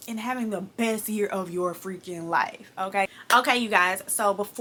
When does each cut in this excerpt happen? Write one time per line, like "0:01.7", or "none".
none